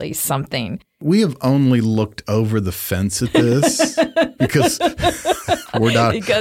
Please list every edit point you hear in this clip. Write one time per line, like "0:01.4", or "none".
0:01.0